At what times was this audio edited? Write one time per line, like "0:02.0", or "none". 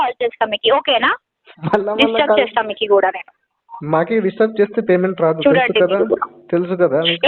none